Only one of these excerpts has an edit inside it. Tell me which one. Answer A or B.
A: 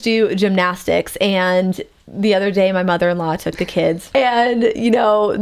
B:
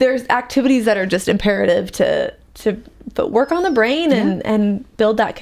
A